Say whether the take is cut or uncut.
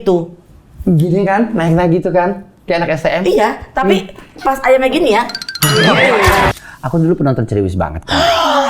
cut